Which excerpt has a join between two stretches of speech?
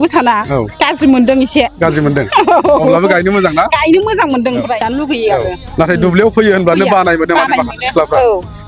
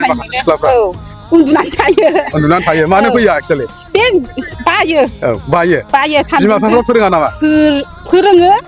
first; 1 cut; at 4.9 s

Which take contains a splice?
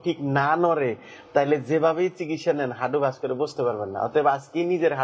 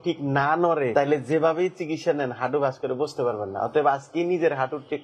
second; 1 cut; at 0.9 s

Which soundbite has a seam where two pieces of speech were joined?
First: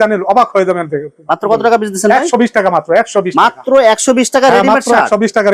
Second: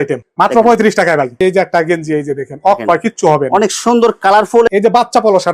second; 2 cuts; at 1.3 s, 4.7 s

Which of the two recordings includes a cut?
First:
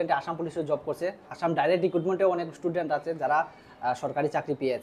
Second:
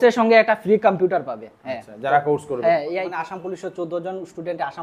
second; 1 cut; at 3.1 s

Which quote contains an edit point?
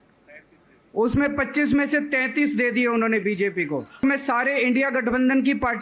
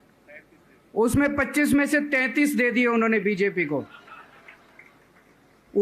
first; 1 cut; at 4.0 s

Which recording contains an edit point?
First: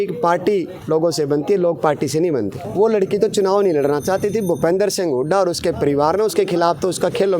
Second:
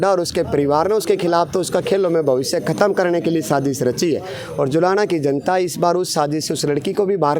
first; 1 cut; at 2.6 s

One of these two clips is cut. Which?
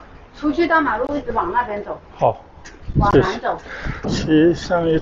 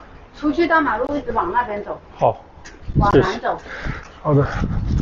first; 1 cut; at 4.0 s

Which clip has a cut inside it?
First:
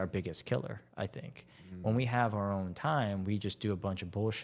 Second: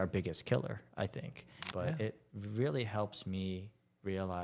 second; 1 cut; at 1.5 s

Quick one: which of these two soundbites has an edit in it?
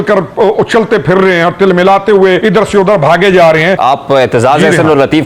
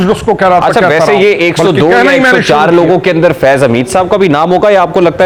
first; 2 cuts; at 2.4 s, 3.8 s

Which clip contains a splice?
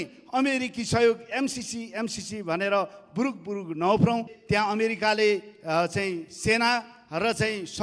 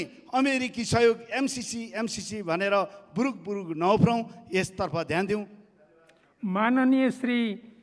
first; 1 cut; at 4.3 s

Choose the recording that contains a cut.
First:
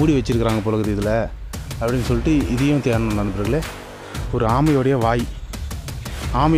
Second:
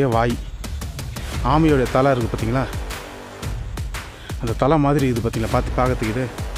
first; 1 cut; at 3.8 s

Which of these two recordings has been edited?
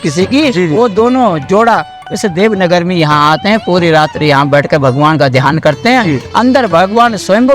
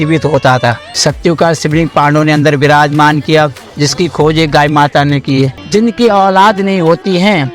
second; 2 cuts; at 0.9 s, 5.6 s

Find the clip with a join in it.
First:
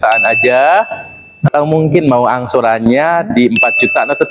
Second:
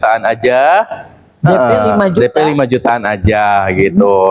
first; 1 cut; at 1.5 s

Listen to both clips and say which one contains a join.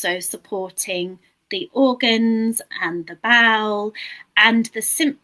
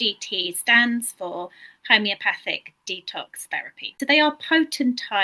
second; 1 cut; at 3.9 s

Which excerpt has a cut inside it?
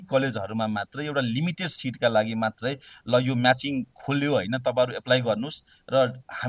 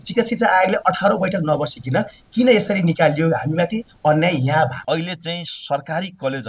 second; 1 cut; at 4.8 s

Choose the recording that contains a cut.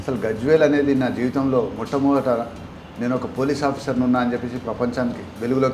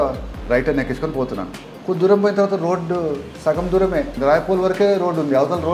second; 2 cuts; at 3.3 s, 4.2 s

